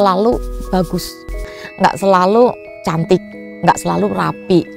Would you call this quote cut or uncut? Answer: cut